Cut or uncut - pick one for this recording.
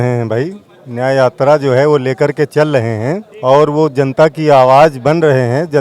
cut